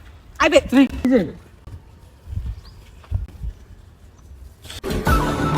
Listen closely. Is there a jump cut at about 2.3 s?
no; 1 cut; at 1.0 s

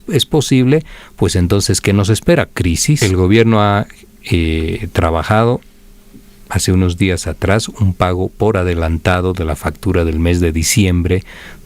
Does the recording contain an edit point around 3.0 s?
yes; 1 cut; at 3.0 s

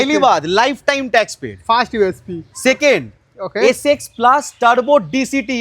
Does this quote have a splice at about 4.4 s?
no; 0 cuts

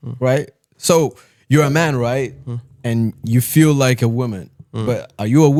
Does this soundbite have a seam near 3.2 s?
no; 0 cuts

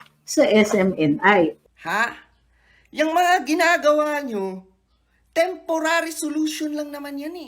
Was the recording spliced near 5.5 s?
no; 1 cut; at 1.6 s

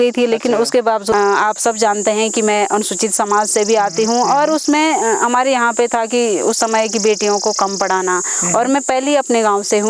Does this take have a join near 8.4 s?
no; 1 cut; at 1.1 s

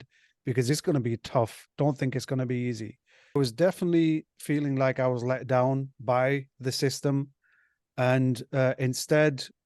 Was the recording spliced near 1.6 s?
no; 1 cut; at 3.4 s

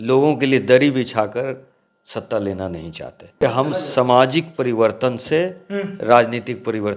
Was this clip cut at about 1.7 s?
no; 1 cut; at 3.4 s

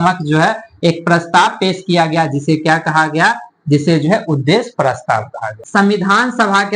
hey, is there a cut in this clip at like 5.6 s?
yes; 1 cut; at 5.6 s

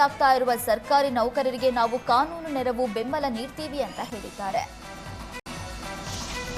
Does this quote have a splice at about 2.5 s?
no; 1 cut; at 5.4 s

